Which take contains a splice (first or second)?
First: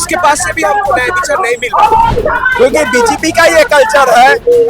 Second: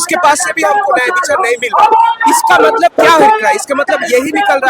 first